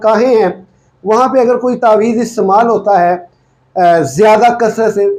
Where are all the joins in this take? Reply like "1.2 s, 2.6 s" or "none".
none